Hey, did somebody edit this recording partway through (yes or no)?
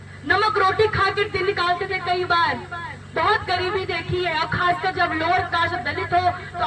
no